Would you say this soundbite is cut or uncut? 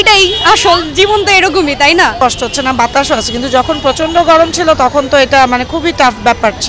uncut